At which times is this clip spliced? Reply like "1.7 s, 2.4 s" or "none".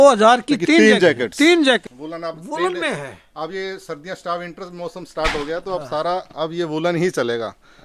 1.8 s

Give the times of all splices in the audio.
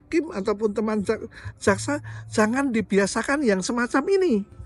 none

